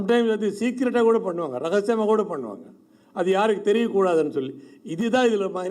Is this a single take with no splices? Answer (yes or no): yes